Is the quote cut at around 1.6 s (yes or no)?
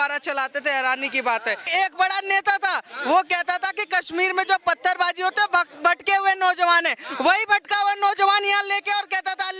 yes